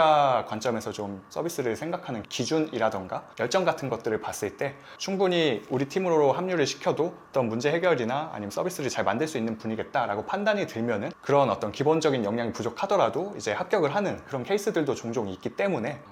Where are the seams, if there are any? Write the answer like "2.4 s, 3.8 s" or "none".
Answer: none